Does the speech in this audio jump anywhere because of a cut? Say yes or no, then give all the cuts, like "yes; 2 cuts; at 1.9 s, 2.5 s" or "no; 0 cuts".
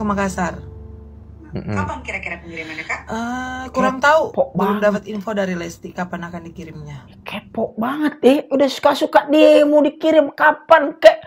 no; 0 cuts